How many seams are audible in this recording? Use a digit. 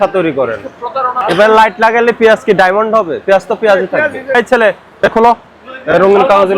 2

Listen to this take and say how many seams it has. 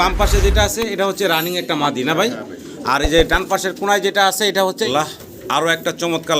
1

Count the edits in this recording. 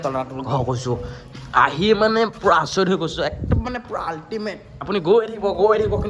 1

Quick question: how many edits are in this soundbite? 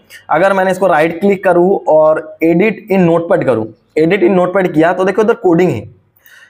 0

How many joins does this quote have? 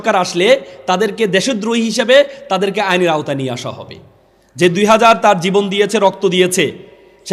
0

